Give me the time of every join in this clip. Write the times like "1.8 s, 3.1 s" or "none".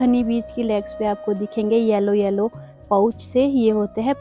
none